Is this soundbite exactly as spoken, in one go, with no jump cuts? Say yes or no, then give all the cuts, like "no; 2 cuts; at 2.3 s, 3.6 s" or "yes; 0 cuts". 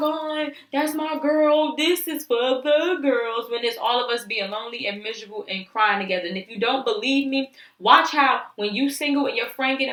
yes; 0 cuts